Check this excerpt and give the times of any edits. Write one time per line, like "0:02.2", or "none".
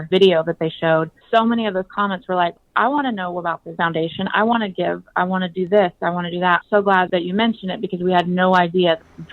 none